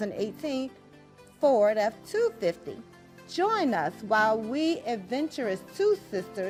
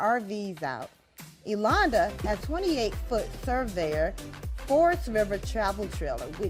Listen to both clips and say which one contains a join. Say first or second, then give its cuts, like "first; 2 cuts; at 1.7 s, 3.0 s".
second; 1 cut; at 2.4 s